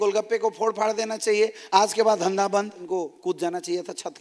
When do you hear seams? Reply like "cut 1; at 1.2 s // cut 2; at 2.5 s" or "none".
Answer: cut 1; at 2.8 s